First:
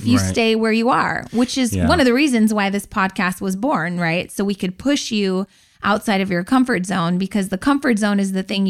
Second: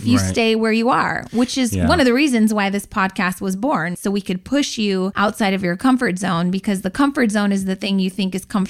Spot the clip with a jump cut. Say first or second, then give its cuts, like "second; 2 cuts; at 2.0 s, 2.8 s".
second; 2 cuts; at 3.9 s, 5.1 s